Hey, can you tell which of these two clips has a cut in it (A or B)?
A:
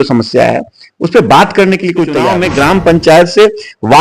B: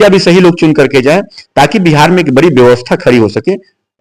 A